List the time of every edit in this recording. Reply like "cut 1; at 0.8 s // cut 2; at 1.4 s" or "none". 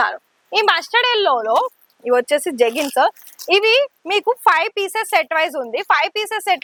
none